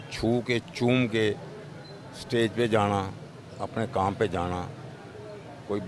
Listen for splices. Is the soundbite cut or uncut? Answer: uncut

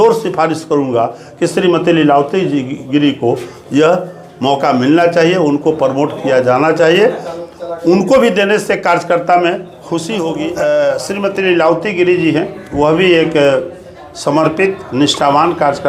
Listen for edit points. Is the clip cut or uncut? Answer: cut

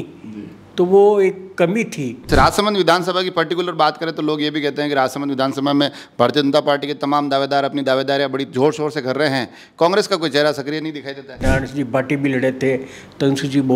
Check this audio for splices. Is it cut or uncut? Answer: cut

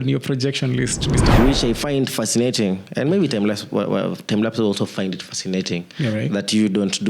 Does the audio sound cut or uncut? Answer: cut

